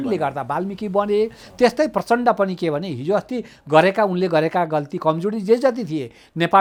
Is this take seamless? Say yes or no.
yes